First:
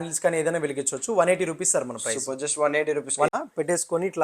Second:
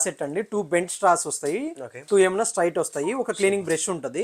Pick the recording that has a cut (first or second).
first